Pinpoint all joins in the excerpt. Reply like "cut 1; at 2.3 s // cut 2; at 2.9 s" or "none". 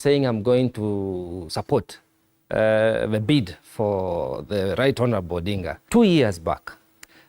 cut 1; at 5.7 s